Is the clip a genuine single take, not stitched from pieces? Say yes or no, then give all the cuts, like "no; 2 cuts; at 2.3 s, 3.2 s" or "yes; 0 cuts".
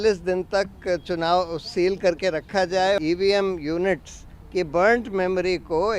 no; 1 cut; at 3.0 s